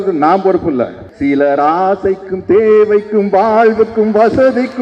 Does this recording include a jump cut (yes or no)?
yes